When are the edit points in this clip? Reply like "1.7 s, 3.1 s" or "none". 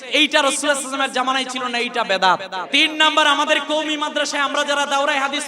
2.6 s